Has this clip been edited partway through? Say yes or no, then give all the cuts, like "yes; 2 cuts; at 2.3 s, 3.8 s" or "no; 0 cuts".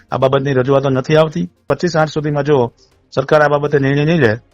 yes; 1 cut; at 1.6 s